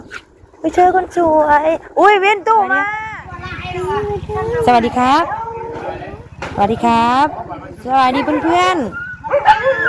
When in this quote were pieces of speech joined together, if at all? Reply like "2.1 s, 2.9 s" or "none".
2.9 s

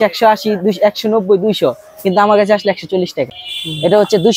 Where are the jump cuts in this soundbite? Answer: 3.4 s

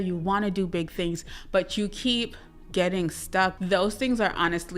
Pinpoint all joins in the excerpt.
3.5 s

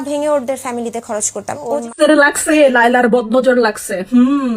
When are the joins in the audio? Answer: 1.9 s

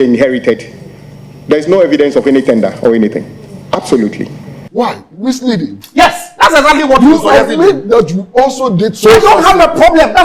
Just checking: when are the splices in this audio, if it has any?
4.6 s

